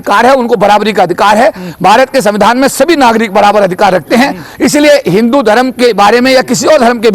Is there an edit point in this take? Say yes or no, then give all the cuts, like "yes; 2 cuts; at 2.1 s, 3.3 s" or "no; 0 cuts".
no; 0 cuts